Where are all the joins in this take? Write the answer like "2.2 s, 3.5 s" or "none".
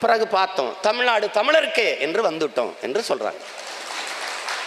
none